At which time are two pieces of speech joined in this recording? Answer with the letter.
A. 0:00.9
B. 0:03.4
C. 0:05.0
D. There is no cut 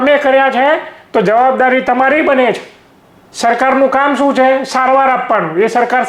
D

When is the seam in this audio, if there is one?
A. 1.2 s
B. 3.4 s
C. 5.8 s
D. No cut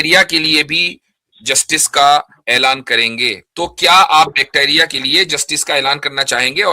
B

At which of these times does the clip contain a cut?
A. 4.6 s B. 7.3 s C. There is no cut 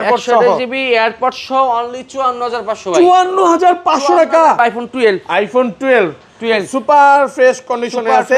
A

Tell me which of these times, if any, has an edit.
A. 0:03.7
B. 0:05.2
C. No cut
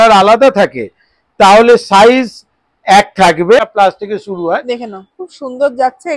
A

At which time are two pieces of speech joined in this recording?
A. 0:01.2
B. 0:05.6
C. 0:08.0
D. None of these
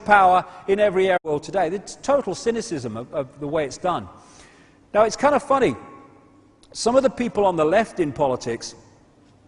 D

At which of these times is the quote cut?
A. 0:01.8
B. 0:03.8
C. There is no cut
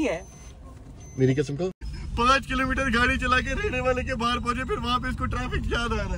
A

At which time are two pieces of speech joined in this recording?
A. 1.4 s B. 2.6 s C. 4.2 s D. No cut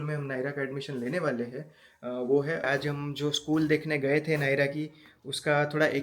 B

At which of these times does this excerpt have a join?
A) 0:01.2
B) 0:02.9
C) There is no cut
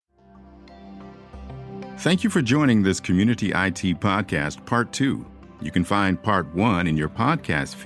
A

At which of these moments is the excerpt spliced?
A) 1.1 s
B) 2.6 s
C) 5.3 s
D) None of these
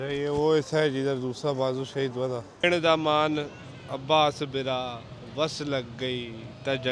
B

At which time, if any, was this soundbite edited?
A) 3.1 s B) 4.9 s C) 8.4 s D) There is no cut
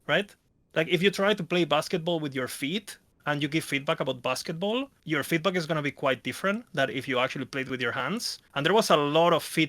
C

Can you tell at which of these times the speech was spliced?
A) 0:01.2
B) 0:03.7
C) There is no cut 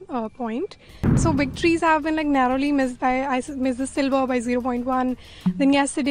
A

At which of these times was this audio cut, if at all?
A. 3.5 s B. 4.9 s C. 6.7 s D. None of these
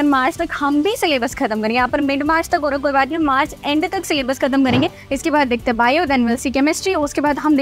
B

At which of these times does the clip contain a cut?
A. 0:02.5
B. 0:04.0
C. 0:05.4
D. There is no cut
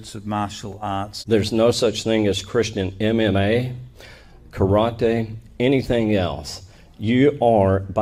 D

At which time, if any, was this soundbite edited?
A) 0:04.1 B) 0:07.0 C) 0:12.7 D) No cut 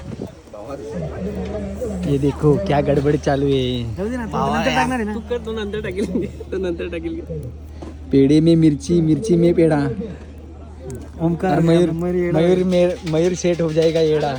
D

